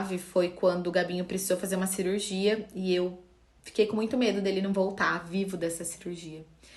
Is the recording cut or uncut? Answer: uncut